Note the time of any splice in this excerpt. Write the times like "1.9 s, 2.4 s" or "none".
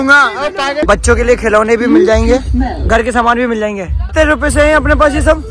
0.8 s, 4.1 s